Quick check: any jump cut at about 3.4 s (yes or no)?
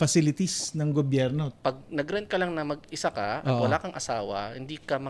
no